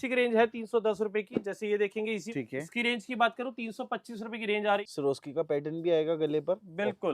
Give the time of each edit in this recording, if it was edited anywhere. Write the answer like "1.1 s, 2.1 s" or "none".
2.2 s, 4.8 s